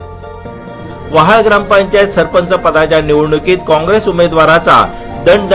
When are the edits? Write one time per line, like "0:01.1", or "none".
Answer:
0:01.1